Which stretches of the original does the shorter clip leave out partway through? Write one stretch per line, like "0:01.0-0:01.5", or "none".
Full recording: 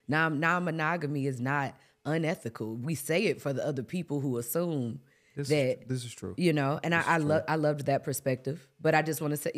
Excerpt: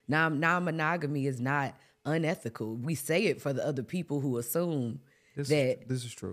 none